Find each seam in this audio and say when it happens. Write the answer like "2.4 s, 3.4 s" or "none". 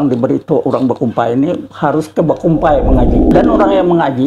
3.2 s

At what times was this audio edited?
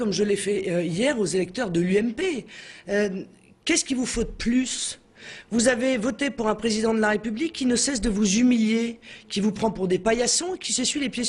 none

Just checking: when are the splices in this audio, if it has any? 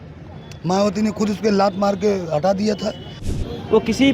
3.2 s

